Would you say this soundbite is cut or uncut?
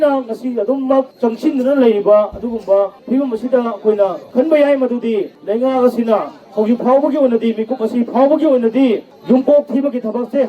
cut